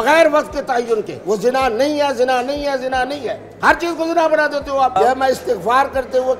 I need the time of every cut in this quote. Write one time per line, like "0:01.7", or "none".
0:01.1
0:05.0